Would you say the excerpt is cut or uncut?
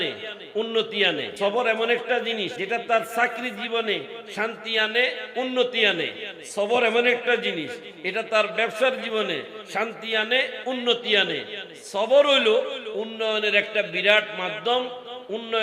cut